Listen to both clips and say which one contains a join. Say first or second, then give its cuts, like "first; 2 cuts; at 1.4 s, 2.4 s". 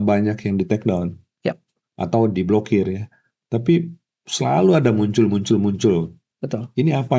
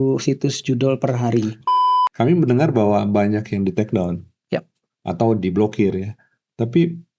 second; 1 cut; at 1.6 s